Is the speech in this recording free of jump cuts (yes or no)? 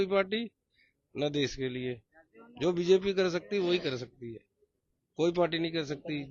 yes